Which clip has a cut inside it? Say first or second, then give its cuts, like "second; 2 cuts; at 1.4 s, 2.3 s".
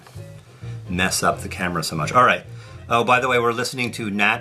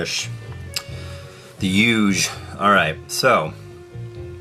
first; 1 cut; at 2.3 s